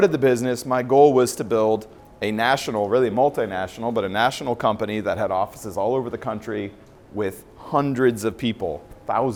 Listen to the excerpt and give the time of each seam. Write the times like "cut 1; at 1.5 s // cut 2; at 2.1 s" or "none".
none

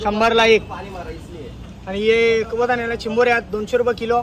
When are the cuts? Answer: none

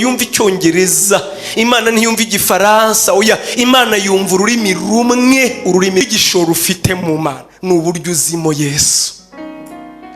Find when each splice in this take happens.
cut 1; at 6.1 s

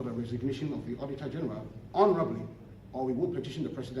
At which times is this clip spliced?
cut 1; at 1.7 s

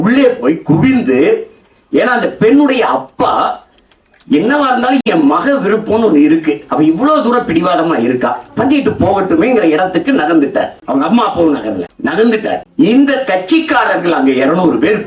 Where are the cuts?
none

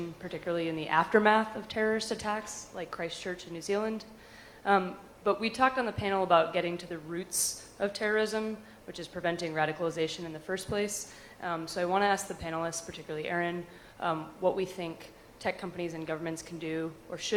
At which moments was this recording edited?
none

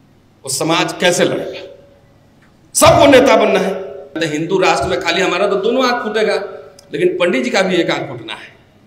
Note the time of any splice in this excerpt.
cut 1; at 4.2 s

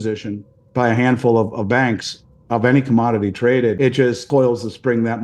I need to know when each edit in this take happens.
cut 1; at 4.0 s

